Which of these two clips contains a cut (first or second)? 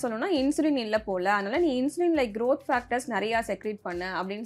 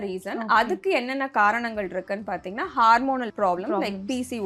second